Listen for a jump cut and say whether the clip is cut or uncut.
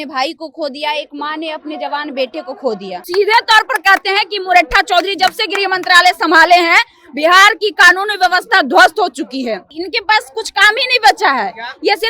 cut